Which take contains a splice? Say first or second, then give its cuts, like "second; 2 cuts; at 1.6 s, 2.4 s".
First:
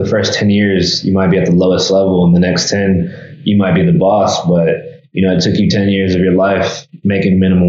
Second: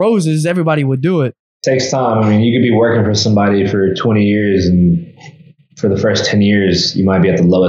second; 1 cut; at 1.6 s